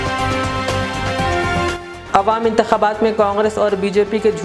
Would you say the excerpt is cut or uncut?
cut